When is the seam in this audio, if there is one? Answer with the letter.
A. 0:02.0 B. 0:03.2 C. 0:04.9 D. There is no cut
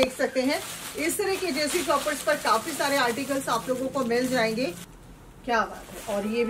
C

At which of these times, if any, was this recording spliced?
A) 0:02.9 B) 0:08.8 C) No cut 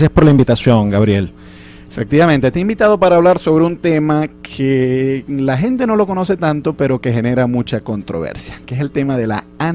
A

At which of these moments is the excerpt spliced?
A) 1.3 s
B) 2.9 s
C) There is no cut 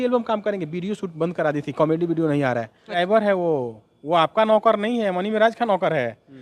B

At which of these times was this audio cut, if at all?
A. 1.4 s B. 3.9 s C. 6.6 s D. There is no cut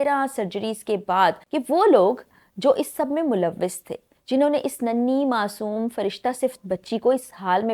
A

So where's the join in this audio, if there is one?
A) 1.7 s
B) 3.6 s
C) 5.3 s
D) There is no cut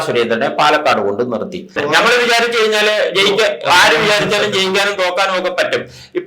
A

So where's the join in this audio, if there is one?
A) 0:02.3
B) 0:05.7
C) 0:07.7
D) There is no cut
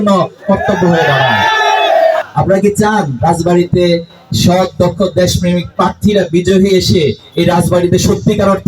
A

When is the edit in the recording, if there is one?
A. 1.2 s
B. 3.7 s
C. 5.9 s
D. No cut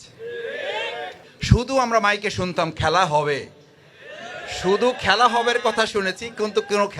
A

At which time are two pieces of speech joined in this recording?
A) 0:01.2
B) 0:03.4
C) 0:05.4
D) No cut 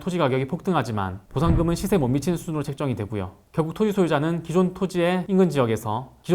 B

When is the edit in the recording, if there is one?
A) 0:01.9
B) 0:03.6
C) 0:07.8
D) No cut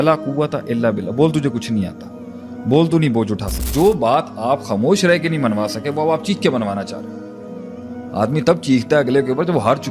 B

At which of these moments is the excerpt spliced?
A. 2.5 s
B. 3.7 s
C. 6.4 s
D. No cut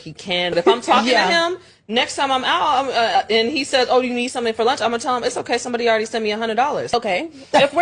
C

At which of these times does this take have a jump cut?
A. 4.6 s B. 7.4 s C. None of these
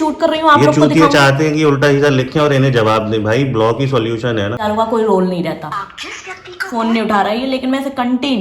A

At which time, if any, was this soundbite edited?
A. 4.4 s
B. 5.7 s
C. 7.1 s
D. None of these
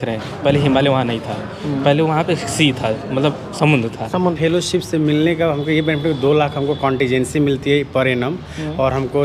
A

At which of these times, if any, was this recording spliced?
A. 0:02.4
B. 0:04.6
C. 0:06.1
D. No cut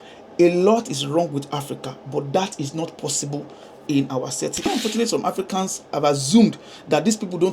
B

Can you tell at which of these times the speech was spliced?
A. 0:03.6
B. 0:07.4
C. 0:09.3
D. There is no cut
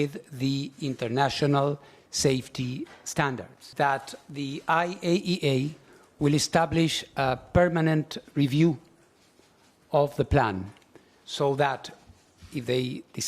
A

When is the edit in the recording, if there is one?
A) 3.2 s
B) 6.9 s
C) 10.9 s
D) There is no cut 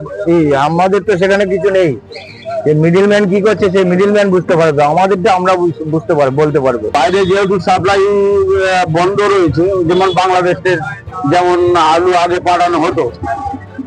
B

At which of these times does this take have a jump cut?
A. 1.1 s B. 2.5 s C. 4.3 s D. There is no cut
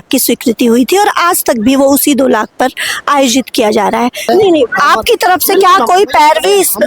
C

